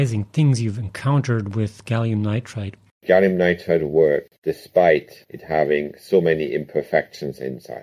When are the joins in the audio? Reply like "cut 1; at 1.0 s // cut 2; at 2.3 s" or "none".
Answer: cut 1; at 3.0 s // cut 2; at 4.4 s